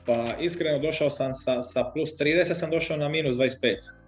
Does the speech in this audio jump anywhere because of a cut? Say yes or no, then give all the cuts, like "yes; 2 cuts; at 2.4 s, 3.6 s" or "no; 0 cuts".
no; 0 cuts